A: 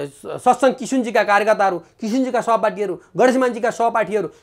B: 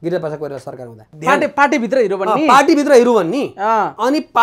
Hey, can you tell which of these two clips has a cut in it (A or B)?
B